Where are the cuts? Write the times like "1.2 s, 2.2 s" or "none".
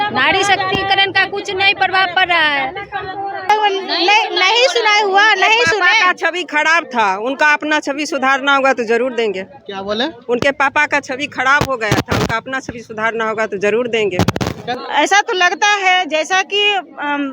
3.5 s, 14.7 s